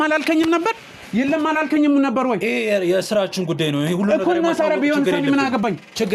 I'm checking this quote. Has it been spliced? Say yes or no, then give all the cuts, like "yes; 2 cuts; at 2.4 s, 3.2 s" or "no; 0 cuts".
no; 0 cuts